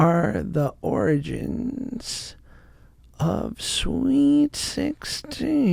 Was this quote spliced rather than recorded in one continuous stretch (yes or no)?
no